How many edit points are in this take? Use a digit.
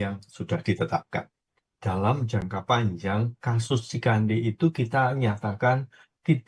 1